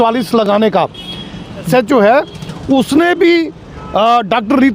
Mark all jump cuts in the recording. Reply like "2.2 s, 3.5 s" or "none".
1.7 s